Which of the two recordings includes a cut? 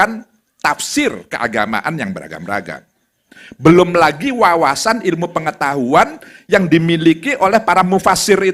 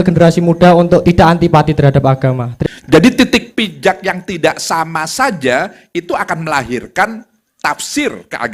second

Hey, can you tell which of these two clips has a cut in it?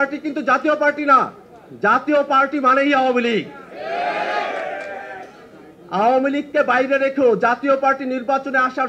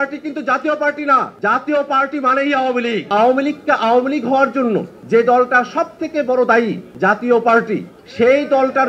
second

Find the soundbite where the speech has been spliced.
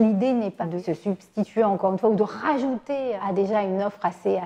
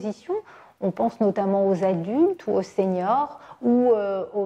first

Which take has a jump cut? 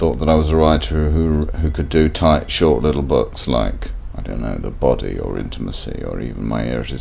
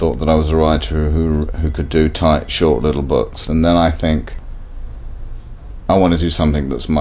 second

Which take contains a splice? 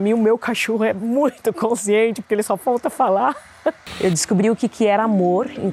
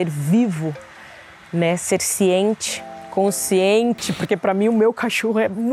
first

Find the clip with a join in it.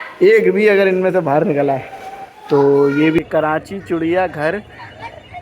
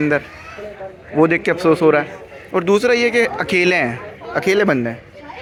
first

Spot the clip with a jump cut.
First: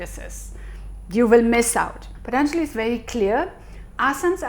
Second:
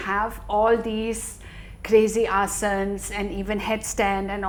first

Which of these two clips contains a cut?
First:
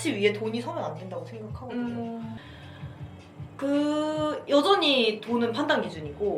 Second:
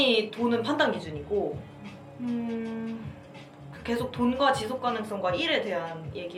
first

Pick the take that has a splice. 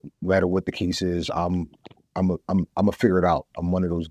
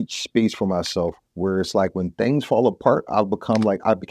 second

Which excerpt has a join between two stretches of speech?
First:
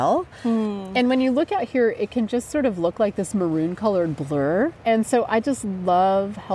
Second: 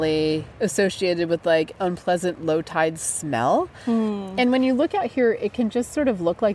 first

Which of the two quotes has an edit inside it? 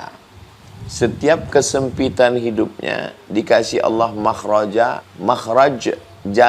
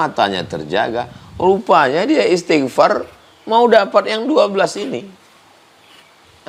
first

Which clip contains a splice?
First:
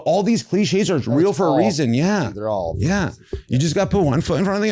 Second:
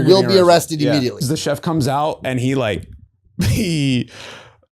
second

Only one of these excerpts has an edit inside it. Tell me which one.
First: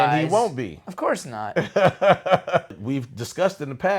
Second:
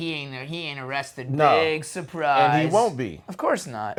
first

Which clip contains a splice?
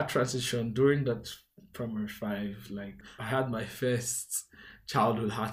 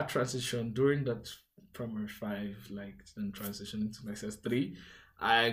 first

